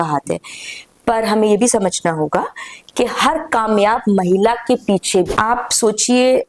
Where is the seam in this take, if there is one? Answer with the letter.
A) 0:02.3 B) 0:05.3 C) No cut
B